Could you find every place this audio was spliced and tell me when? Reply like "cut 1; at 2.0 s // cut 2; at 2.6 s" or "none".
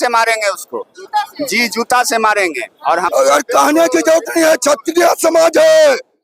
cut 1; at 3.1 s